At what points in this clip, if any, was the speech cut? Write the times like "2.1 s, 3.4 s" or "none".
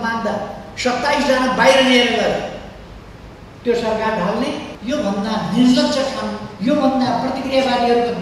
4.7 s